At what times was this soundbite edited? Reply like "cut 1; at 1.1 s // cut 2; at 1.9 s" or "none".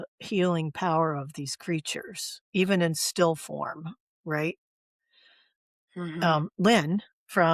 none